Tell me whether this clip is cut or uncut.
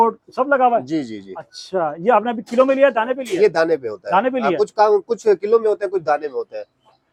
uncut